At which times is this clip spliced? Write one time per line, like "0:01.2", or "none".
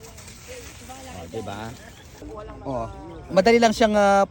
0:02.3